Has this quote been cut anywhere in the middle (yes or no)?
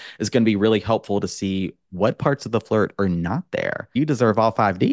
yes